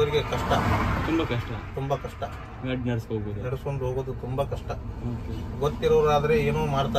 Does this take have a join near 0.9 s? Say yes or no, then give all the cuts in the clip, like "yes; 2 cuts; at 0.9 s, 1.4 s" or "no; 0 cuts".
no; 0 cuts